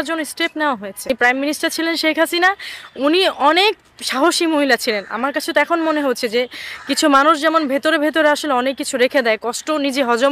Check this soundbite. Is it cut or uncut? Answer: cut